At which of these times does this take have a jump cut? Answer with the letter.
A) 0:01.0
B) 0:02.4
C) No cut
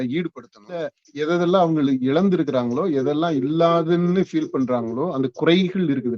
A